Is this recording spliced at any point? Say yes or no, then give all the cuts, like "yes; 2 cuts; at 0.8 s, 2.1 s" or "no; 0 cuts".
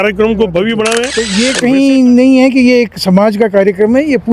yes; 1 cut; at 1.2 s